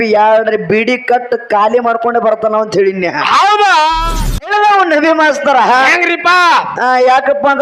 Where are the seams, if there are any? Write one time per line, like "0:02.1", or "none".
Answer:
0:04.0